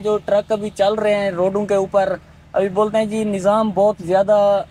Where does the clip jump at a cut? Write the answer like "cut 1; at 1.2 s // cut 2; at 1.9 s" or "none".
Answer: none